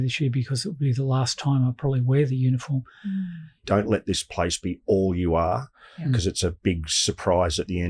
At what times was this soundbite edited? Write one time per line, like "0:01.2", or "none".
0:03.7